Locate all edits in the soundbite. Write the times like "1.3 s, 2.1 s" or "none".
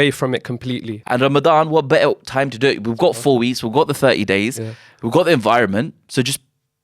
1.0 s